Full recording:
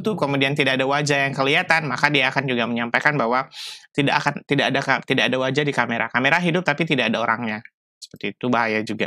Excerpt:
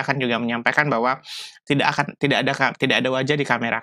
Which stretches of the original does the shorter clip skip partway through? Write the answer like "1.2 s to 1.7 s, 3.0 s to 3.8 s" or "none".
none

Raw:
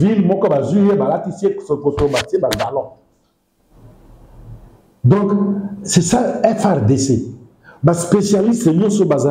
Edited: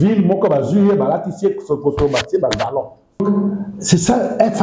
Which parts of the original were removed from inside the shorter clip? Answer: 3.2 s to 5.2 s

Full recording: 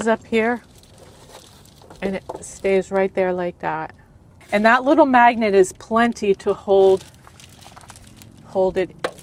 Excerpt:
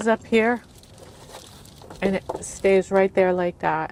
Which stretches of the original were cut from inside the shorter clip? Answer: none

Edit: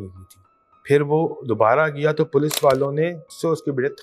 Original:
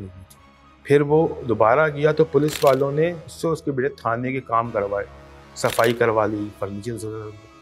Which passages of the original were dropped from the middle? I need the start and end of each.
none

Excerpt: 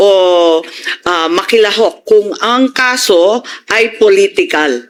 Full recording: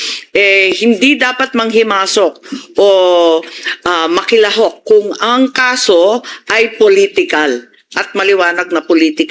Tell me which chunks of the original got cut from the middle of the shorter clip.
none

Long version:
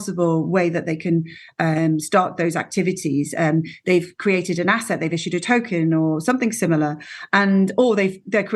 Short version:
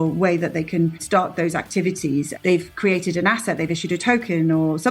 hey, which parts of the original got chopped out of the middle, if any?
1.4 s to 2.0 s, 3.3 s to 3.7 s

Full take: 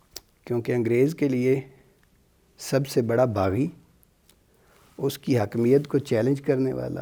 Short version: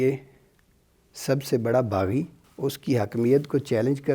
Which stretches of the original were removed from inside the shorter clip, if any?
3.9 s to 4.8 s

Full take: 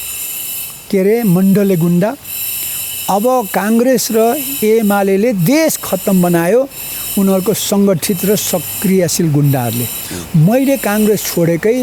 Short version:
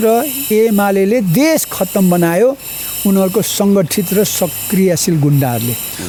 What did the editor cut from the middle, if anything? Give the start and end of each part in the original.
none

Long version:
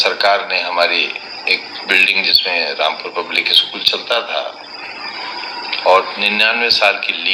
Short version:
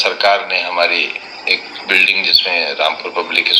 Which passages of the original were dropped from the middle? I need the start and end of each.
none

